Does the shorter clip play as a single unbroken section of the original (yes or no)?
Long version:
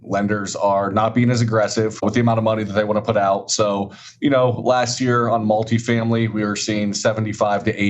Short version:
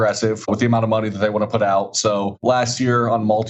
no